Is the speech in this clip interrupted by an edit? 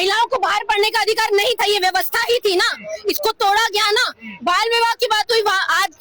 no; 0 cuts

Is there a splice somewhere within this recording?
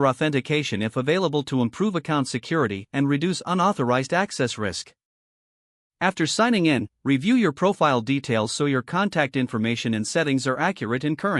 no; 0 cuts

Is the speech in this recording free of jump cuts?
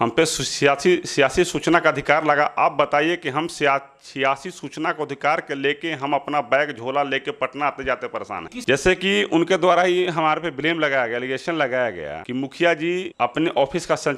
no; 1 cut; at 8.6 s

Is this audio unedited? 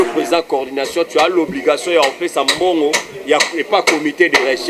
yes; 0 cuts

